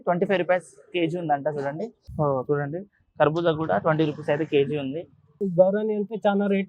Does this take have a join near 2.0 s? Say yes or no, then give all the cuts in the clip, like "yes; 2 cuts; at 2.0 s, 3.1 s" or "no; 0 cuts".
yes; 2 cuts; at 2.0 s, 5.4 s